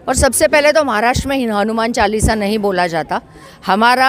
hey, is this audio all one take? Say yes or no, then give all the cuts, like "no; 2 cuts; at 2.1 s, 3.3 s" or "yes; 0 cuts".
yes; 0 cuts